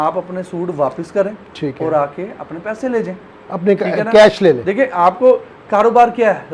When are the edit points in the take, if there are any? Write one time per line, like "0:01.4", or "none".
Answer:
none